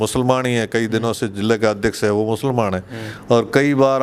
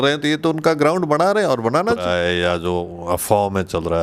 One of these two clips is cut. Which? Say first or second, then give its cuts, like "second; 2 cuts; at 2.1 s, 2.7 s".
second; 1 cut; at 2.1 s